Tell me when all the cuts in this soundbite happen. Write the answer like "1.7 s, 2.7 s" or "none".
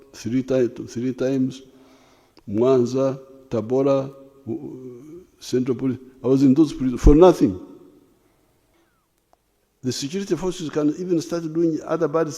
8.7 s